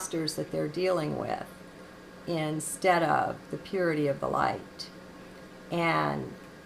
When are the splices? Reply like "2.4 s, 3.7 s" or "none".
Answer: 2.4 s